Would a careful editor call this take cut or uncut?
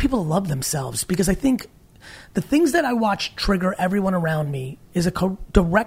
uncut